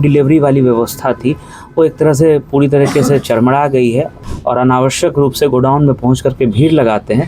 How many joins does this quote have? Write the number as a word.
one